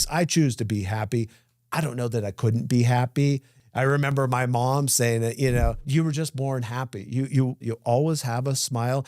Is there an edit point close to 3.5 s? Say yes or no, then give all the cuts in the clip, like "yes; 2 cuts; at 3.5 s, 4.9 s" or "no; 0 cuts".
yes; 3 cuts; at 3.5 s, 5.8 s, 7.7 s